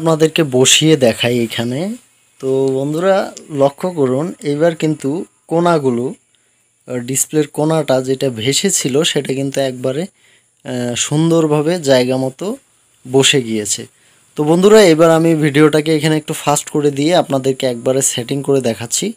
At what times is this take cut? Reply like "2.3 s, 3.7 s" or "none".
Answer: none